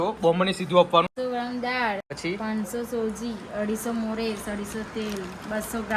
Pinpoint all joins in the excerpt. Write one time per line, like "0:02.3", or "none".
0:01.1
0:02.1